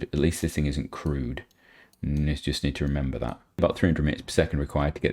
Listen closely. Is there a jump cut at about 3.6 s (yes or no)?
yes